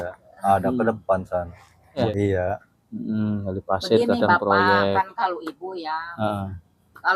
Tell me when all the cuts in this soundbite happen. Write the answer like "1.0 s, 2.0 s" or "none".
2.1 s